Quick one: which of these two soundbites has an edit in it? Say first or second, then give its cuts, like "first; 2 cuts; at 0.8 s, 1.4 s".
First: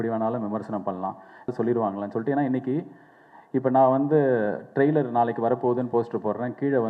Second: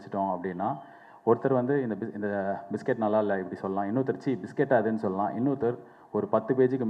first; 1 cut; at 1.5 s